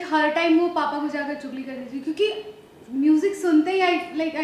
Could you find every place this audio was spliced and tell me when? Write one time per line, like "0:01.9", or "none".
none

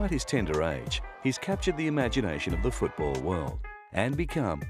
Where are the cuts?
none

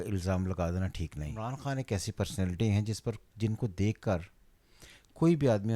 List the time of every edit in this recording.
0:01.3

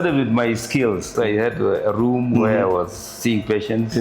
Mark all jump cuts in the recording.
0:01.1

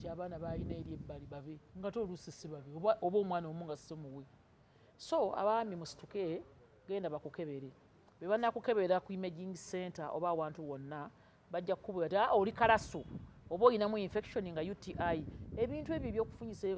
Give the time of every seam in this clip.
none

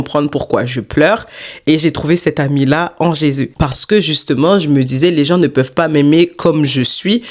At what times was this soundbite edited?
0:03.5

